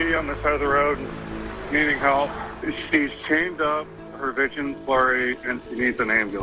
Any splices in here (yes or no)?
no